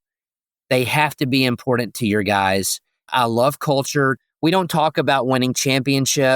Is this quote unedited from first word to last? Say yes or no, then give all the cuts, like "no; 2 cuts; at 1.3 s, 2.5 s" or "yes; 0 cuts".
no; 2 cuts; at 3.1 s, 4.2 s